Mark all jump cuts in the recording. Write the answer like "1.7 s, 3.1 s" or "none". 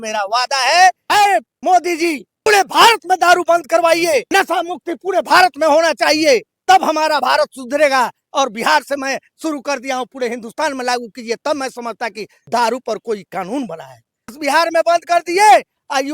1.3 s, 2.5 s, 4.3 s, 6.5 s, 12.3 s, 14.4 s